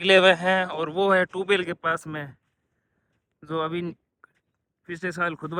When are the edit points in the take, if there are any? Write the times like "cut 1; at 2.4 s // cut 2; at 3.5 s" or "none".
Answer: none